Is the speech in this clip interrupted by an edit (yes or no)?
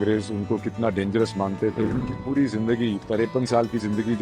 yes